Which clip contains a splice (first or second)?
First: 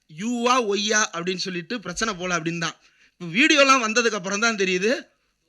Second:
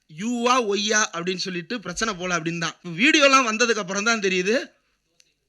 second